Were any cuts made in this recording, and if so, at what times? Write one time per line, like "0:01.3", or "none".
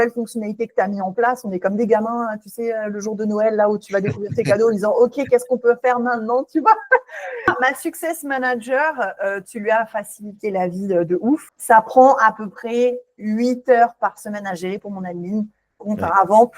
0:07.5
0:11.5